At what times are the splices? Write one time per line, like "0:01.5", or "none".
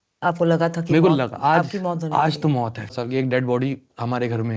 0:02.9